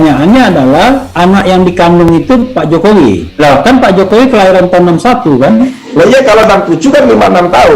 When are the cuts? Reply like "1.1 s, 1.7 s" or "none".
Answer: 3.3 s

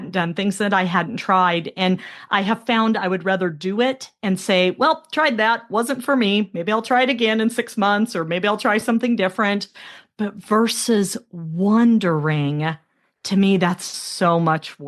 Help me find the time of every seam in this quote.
none

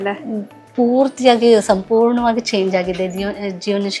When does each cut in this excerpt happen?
none

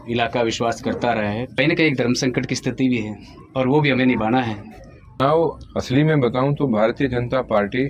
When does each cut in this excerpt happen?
1.6 s, 5.2 s

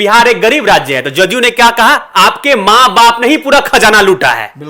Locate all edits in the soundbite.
none

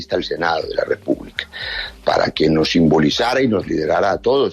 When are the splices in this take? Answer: 1.9 s

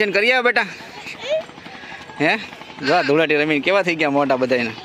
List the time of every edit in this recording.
none

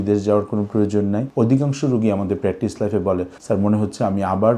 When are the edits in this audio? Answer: 1.3 s

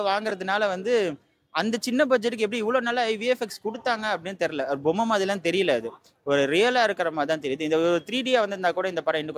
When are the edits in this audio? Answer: none

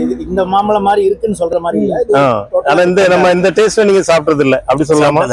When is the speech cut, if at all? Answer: none

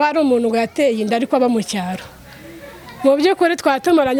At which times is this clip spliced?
none

